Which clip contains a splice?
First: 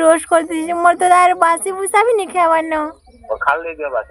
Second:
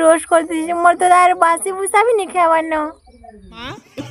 first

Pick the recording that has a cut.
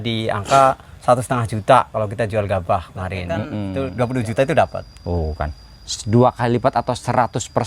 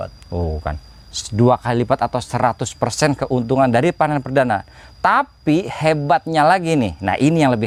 first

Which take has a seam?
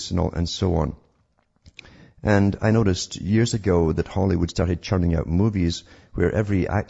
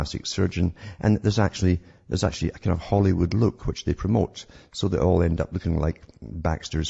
second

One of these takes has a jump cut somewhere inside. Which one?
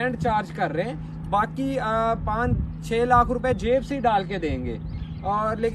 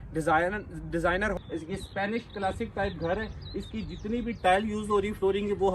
second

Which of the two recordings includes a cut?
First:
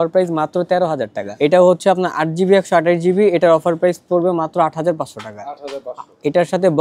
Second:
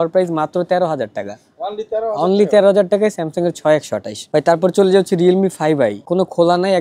first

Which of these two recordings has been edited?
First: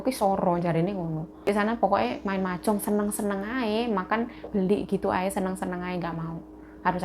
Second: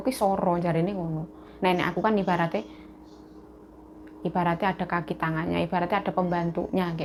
first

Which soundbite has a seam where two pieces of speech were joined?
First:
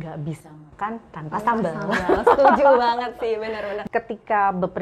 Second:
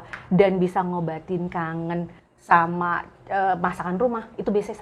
first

